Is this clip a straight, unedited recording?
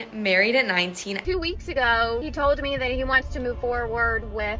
yes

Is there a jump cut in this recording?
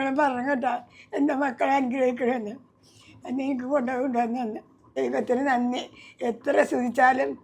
yes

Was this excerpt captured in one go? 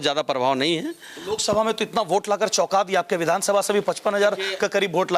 yes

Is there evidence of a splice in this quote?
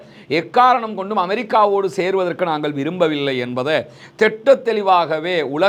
no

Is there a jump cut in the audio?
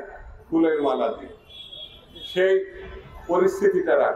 no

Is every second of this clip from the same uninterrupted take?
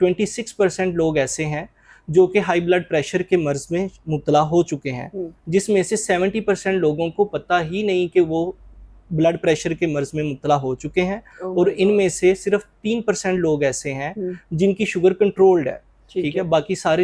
yes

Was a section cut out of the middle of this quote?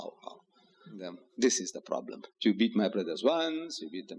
yes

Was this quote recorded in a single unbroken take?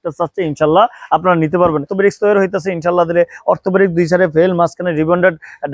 no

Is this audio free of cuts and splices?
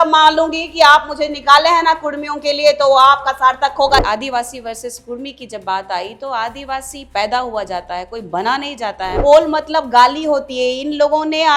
no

